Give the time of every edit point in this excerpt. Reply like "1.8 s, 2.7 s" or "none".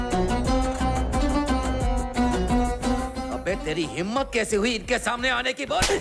3.0 s